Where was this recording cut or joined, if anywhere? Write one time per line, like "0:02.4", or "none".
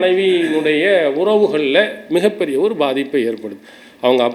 none